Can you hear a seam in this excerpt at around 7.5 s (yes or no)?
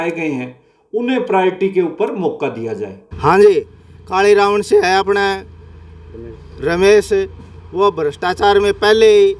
no